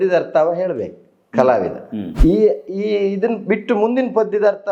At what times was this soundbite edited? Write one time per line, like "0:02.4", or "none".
0:02.1

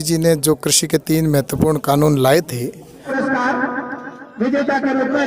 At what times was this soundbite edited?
0:03.1

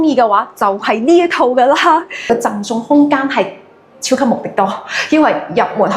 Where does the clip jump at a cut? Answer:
0:02.3

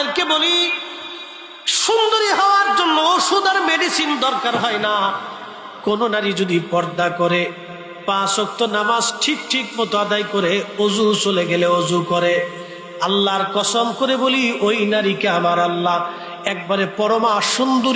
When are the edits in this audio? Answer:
none

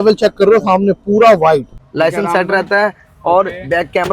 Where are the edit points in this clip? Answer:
0:01.8

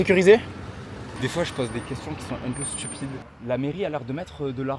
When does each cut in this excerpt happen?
0:01.1
0:03.3

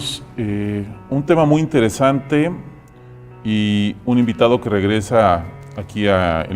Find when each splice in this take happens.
none

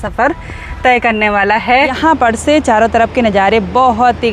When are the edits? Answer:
0:02.0

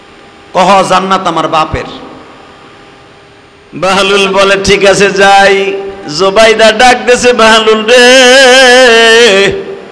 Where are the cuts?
0:03.5

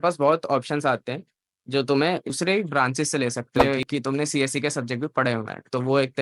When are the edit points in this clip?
0:02.3
0:03.6

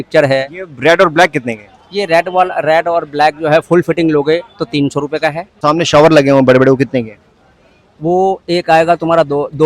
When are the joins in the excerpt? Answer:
0:05.5

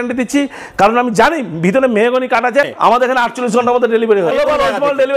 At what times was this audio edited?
0:02.7
0:04.3

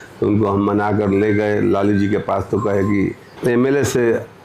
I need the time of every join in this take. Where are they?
0:03.3

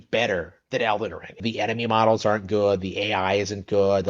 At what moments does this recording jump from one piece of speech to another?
0:01.4

